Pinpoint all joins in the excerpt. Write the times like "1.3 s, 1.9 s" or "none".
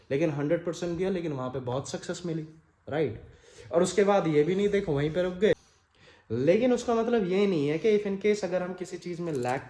5.7 s